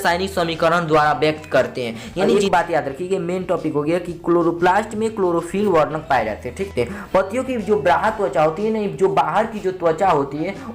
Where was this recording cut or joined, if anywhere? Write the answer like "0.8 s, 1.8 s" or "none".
2.1 s, 6.7 s